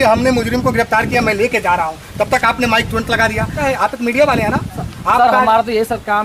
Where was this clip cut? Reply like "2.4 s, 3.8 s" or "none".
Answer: 3.6 s